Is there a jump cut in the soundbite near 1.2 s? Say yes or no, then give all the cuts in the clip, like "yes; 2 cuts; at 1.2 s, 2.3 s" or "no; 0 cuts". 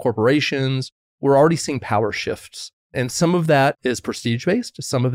yes; 3 cuts; at 1.2 s, 2.8 s, 3.8 s